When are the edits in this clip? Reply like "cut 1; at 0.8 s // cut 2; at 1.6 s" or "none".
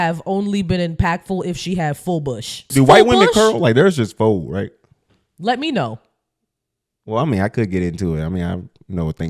cut 1; at 2.7 s